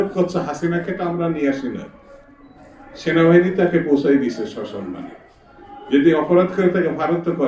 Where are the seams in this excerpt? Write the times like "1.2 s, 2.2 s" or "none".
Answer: none